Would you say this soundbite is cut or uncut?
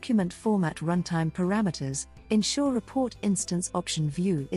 uncut